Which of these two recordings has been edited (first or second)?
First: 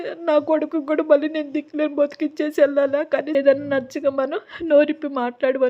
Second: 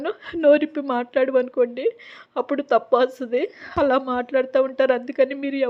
first